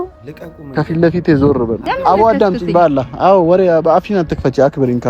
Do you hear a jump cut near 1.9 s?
yes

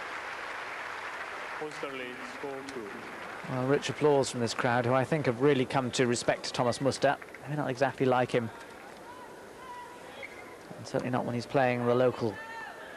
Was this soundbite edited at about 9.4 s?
no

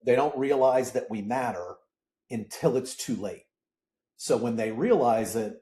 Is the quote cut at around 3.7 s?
no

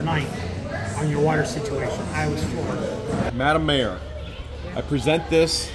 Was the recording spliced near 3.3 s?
yes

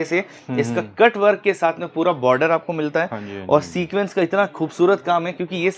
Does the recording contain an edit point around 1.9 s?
no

